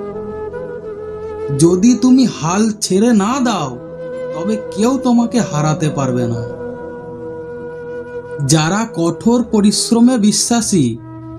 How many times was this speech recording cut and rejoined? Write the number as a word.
one